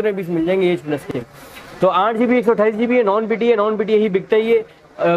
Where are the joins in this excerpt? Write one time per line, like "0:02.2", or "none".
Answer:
0:01.3